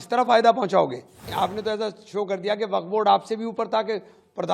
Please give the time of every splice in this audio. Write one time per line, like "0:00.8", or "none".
0:01.3